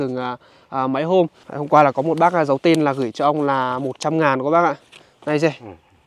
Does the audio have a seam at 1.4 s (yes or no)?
yes